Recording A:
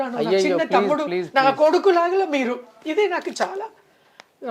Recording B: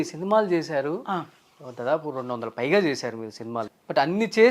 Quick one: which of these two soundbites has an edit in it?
B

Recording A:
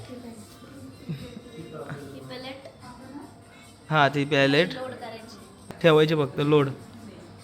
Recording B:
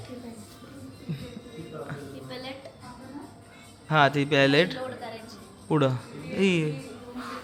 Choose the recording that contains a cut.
A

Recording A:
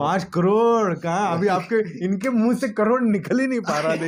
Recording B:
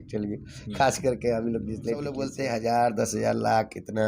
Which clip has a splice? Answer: B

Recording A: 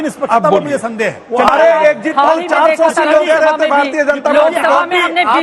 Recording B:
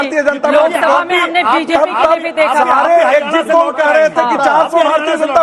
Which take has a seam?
A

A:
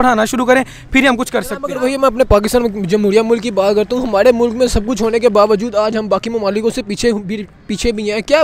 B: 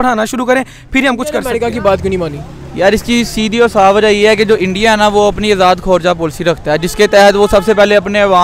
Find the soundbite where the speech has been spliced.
B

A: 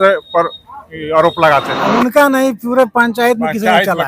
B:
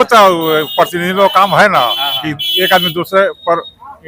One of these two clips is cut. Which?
A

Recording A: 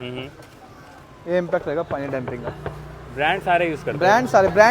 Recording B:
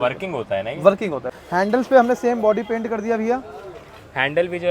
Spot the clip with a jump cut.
B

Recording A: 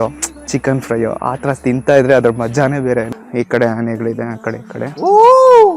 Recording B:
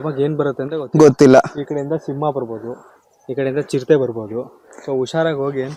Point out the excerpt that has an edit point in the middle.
A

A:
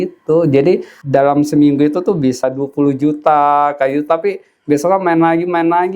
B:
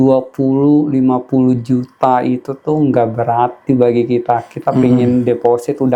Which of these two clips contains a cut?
A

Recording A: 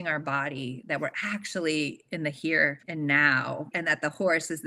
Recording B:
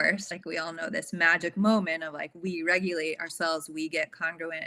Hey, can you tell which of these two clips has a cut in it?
A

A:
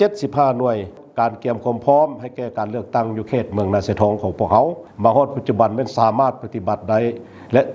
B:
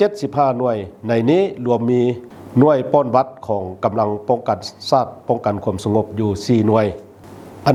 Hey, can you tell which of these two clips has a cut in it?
A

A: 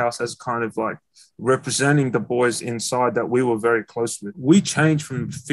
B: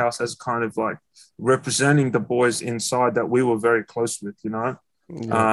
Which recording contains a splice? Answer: A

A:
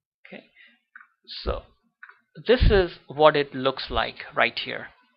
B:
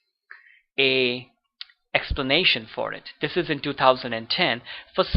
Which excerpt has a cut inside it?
B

